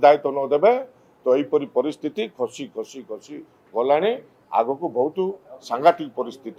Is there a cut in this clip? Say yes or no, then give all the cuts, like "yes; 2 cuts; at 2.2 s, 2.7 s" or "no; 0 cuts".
no; 0 cuts